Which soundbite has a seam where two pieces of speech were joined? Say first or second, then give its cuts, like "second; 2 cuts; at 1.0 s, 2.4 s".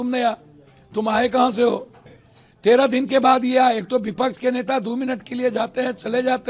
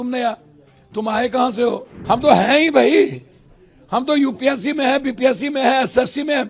second; 1 cut; at 1.9 s